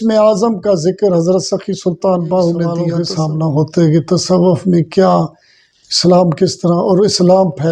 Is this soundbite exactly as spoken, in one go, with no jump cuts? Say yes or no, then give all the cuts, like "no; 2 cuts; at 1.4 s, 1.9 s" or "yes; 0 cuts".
no; 1 cut; at 3.0 s